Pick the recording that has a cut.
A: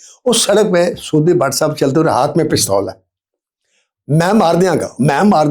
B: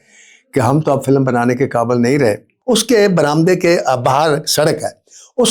B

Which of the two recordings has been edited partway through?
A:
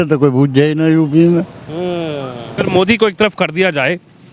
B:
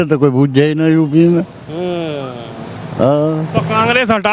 A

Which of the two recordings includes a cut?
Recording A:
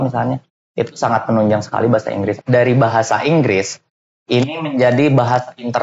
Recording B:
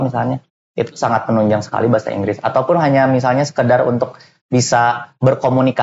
A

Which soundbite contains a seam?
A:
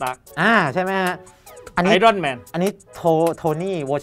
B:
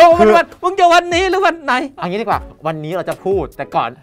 A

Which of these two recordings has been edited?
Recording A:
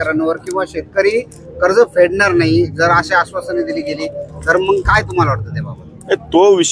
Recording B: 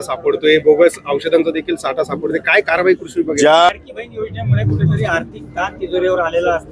B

